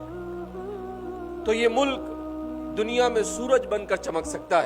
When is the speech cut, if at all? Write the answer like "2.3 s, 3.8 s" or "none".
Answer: none